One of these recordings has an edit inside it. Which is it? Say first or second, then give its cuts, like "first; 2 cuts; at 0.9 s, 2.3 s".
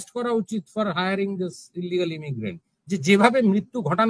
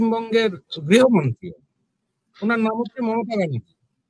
first; 1 cut; at 2.7 s